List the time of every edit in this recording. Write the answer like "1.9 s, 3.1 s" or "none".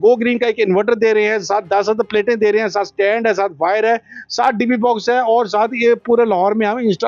none